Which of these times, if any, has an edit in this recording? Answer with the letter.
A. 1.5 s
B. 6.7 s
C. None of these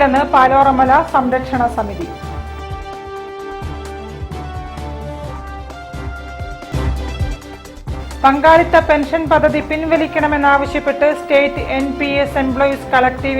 B